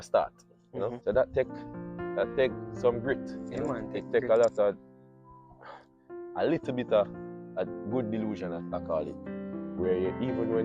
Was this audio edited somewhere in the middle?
yes; 1 cut; at 1.0 s

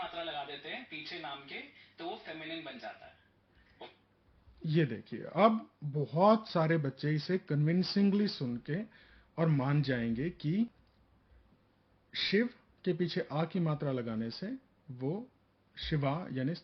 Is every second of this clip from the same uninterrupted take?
yes; 0 cuts

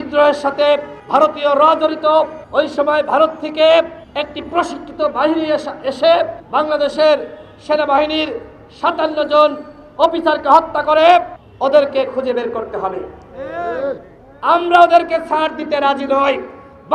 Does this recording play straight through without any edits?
no; 5 cuts; at 0.9 s, 2.4 s, 4.0 s, 6.4 s, 11.4 s

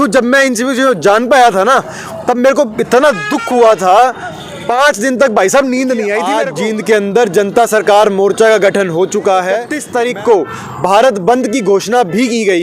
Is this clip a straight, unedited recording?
no; 2 cuts; at 6.4 s, 9.8 s

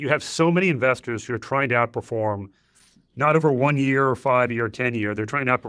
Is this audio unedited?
yes; 0 cuts

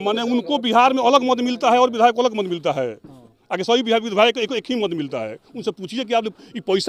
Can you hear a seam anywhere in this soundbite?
no; 0 cuts

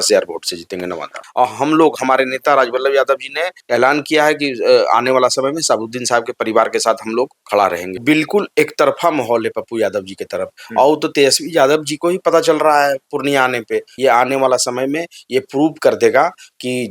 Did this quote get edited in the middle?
yes; 4 cuts; at 1.2 s, 3.6 s, 7.9 s, 13.9 s

